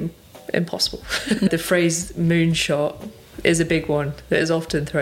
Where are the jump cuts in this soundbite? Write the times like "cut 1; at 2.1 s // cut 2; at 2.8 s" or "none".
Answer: cut 1; at 1.5 s